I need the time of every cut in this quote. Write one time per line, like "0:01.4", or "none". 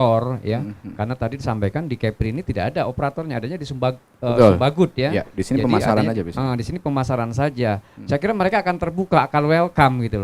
none